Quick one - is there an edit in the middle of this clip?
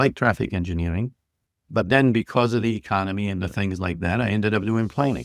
no; 0 cuts

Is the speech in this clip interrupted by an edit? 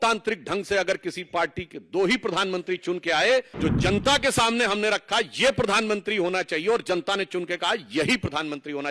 yes; 1 cut; at 3.5 s

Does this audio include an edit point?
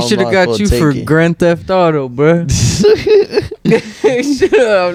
no; 0 cuts

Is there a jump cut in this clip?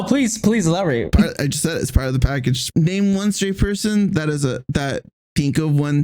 yes; 2 cuts; at 2.7 s, 5.2 s

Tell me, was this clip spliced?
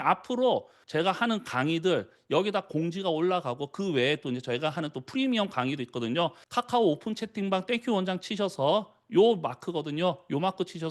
no; 0 cuts

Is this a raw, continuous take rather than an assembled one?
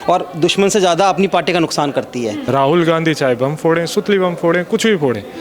no; 1 cut; at 2.4 s

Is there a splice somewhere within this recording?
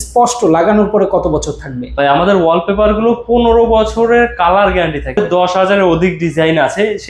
yes; 1 cut; at 5.2 s

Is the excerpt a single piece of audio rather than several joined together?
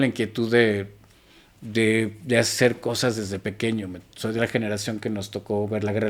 yes; 0 cuts

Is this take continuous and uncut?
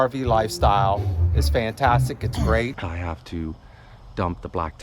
no; 1 cut; at 2.9 s

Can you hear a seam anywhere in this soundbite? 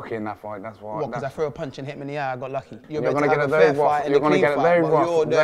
yes; 1 cut; at 2.8 s

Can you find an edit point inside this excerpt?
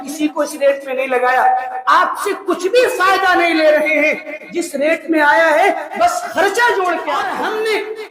yes; 1 cut; at 7.2 s

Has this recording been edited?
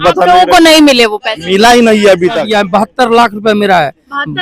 yes; 1 cut; at 2.5 s

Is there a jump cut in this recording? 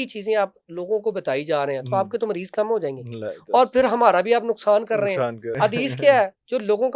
yes; 1 cut; at 5.5 s

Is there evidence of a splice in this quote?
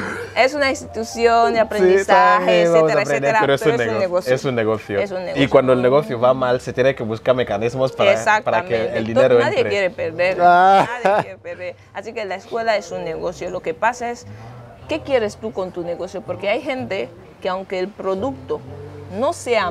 no; 0 cuts

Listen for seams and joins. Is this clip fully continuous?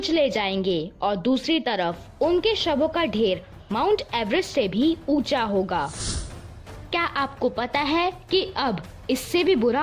no; 1 cut; at 6.9 s

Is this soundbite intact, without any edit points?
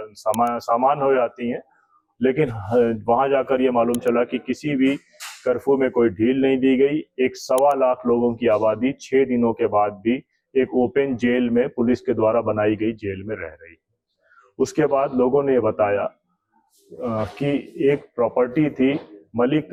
yes; 0 cuts

